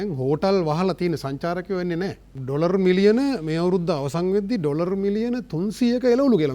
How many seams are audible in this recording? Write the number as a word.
one